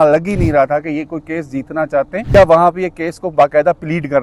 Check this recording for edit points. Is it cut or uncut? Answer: cut